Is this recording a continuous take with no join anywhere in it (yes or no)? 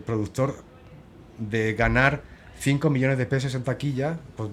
yes